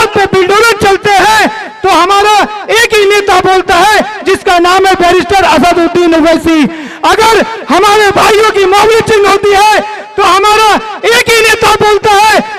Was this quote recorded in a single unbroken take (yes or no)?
yes